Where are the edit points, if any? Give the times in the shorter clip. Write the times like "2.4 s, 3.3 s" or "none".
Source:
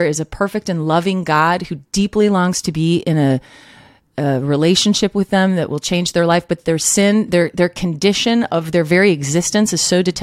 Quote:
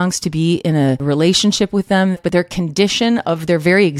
1.0 s, 2.2 s